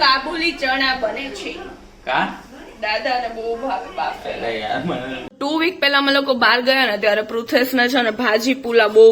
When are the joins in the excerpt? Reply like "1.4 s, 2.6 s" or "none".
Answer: 5.2 s